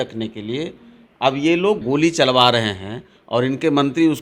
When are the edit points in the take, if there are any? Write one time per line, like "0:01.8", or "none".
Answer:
0:01.8

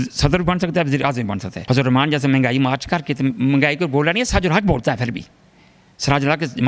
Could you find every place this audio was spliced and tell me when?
0:01.5

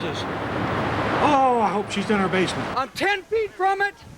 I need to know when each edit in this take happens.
0:02.6

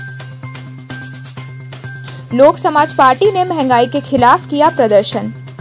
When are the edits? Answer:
0:01.3

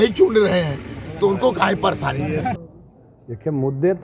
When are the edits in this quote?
0:02.6

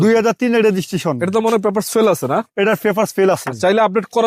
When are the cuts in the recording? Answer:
none

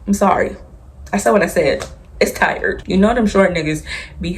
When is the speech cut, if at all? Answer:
0:02.8

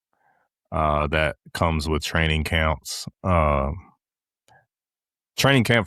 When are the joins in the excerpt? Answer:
none

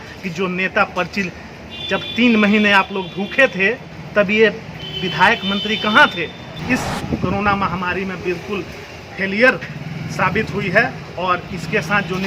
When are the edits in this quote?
0:06.6

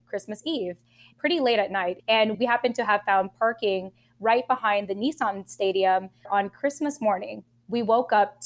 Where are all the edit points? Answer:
0:02.0
0:06.3

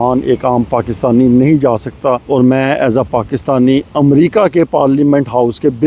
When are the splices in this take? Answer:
0:02.2

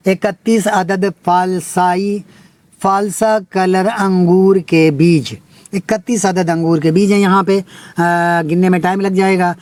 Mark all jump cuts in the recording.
none

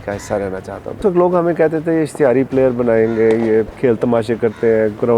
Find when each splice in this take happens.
0:01.0
0:03.7

